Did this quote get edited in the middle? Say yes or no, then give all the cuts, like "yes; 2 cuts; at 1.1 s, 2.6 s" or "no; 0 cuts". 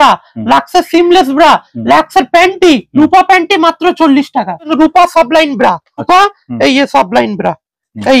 yes; 2 cuts; at 4.7 s, 6.1 s